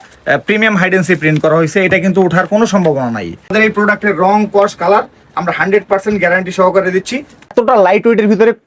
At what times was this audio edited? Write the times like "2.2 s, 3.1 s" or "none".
3.5 s, 7.5 s